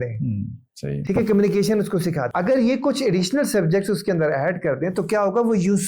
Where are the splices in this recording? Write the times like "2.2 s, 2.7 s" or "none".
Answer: 2.2 s